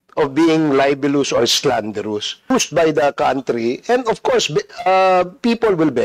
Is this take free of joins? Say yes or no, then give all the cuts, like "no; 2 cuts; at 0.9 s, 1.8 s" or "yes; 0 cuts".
no; 1 cut; at 2.5 s